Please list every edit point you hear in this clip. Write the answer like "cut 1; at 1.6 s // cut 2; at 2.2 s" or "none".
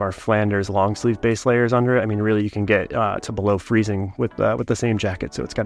none